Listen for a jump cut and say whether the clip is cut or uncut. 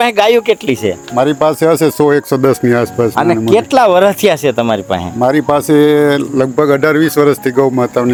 uncut